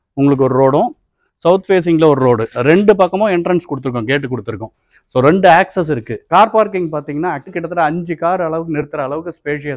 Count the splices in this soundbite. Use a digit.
2